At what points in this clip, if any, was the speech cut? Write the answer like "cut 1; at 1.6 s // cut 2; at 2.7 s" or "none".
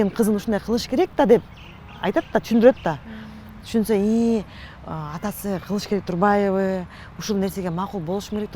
none